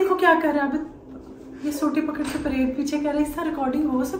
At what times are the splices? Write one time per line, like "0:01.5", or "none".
none